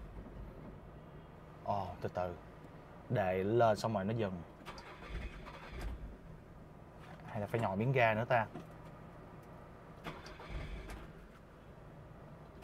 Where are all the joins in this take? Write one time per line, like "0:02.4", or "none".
none